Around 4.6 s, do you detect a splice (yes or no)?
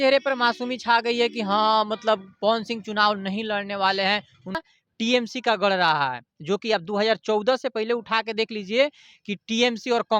yes